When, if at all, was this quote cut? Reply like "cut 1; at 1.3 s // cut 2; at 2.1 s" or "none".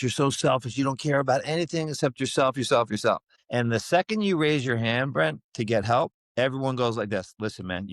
cut 1; at 3.3 s // cut 2; at 6.2 s